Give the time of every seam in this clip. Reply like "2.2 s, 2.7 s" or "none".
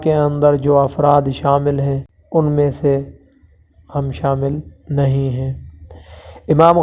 2.1 s